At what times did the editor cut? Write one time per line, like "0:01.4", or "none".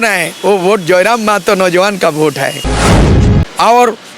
0:03.0